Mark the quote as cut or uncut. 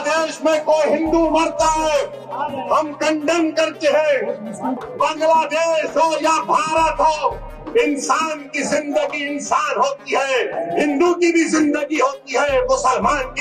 cut